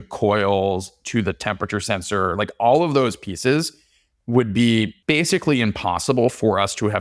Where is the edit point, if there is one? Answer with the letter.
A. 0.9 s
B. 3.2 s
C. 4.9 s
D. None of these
C